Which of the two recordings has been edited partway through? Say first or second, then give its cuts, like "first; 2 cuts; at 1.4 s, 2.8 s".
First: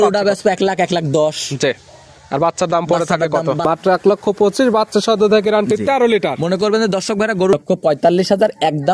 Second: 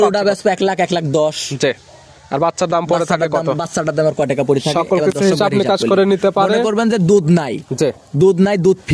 first; 2 cuts; at 3.6 s, 7.5 s